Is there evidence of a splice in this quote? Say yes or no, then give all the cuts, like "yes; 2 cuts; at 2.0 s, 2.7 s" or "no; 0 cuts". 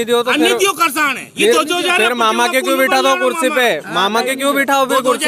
no; 0 cuts